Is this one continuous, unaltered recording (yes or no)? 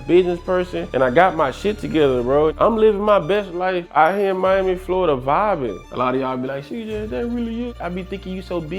no